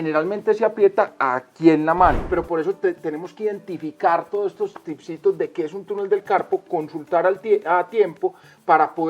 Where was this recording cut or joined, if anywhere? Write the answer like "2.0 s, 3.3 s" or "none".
2.2 s